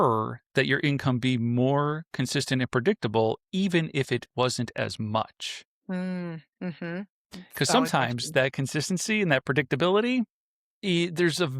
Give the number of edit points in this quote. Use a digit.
0